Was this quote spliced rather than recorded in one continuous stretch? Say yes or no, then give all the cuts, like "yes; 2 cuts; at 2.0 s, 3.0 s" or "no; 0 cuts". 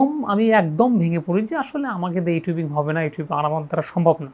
no; 0 cuts